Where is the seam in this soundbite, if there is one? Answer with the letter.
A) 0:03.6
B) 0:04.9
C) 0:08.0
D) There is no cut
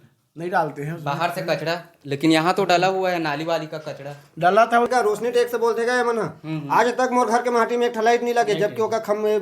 B